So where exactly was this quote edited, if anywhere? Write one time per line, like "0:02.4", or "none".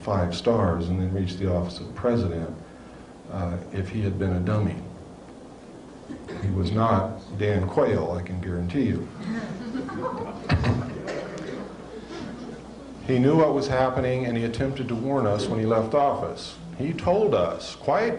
0:08.6

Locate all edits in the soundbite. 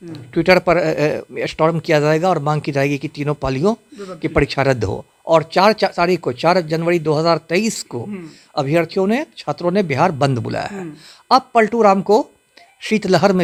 none

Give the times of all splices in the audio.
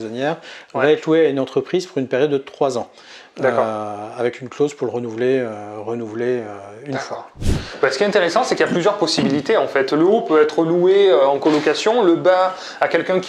0:07.4

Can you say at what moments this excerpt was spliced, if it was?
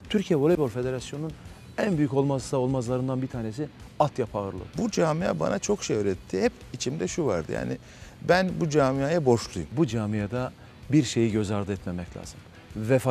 0:04.7
0:09.7

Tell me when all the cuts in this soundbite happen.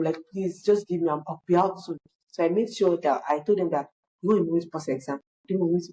none

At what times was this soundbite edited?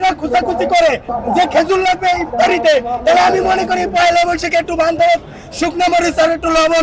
0:01.0

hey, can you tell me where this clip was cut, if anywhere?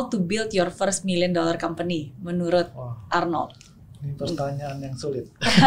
none

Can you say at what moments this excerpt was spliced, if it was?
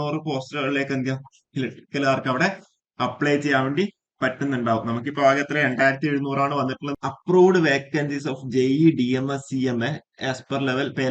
0:06.9

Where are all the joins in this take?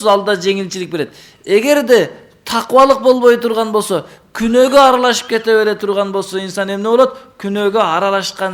none

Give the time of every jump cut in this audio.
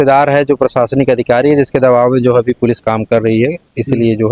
none

